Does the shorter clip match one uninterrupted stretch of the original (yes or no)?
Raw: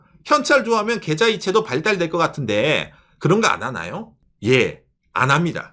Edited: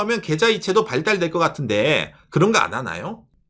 no